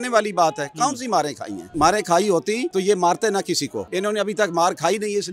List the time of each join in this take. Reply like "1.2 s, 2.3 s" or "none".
1.7 s, 2.7 s, 3.8 s